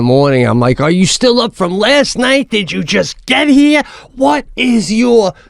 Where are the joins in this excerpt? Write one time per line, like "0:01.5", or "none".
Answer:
none